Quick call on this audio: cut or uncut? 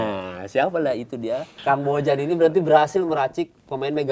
cut